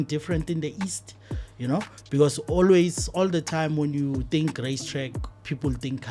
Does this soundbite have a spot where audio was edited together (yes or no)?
no